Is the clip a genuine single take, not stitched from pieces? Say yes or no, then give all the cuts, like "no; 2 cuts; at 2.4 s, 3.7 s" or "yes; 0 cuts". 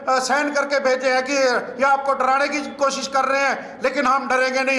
yes; 0 cuts